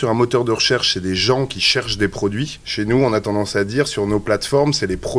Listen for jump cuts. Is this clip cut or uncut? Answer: cut